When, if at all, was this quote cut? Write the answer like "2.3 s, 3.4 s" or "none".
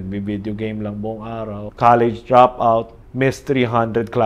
1.7 s, 3.0 s

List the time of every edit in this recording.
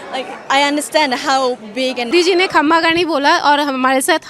2.1 s

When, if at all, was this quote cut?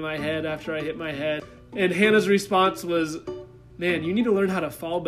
1.5 s

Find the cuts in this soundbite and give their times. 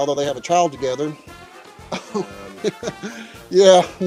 none

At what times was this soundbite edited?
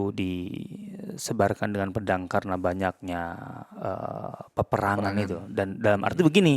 none

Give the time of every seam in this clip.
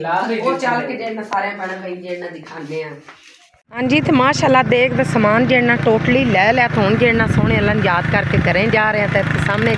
3.7 s

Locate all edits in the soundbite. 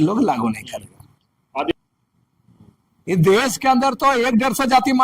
1.7 s

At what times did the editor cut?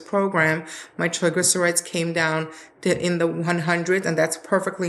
none

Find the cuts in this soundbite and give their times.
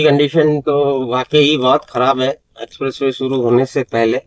none

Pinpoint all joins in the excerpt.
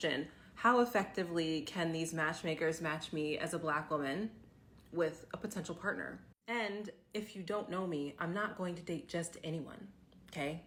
none

